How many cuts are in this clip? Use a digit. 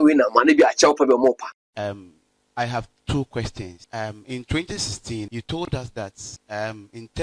4